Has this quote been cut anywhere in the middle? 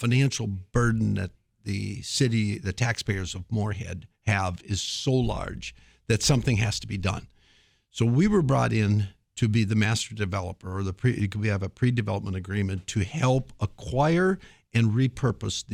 no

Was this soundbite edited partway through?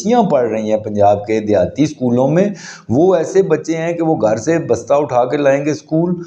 no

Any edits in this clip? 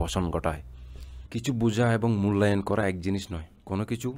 yes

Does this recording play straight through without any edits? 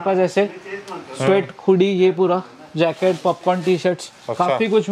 yes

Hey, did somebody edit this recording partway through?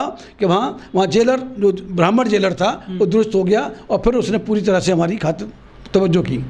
no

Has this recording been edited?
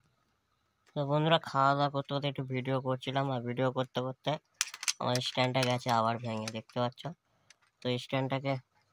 no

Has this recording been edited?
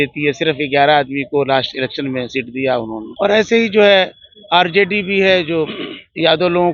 no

